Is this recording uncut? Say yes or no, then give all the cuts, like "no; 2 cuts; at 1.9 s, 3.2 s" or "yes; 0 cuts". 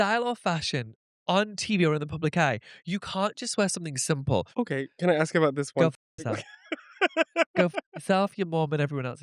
no; 1 cut; at 4.5 s